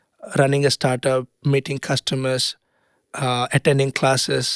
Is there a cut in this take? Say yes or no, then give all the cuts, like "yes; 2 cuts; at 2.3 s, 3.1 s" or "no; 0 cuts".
no; 0 cuts